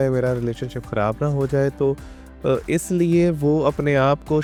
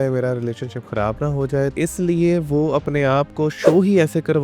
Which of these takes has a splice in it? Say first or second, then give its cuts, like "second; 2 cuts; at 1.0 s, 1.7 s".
second; 1 cut; at 1.7 s